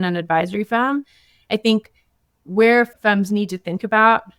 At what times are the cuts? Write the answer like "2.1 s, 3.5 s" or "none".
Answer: none